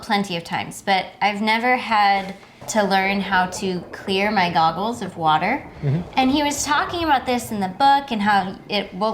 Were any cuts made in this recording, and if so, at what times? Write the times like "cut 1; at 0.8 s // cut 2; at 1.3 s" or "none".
cut 1; at 2.6 s